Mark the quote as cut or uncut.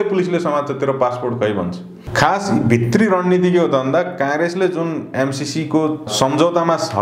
cut